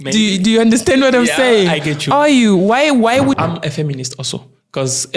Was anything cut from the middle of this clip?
yes; 1 cut; at 3.4 s

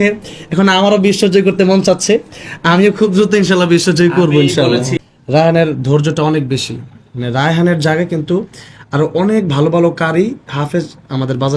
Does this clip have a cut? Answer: yes; 1 cut; at 4.9 s

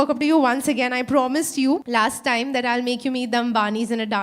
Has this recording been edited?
yes; 1 cut; at 1.8 s

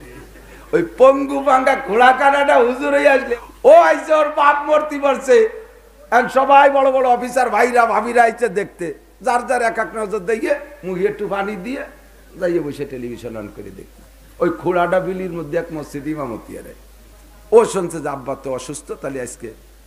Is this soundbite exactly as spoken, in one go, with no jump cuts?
no; 1 cut; at 3.4 s

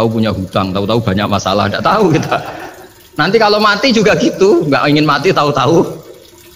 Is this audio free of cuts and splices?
yes; 0 cuts

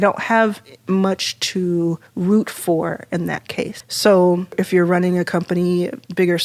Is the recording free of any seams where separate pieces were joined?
yes; 0 cuts

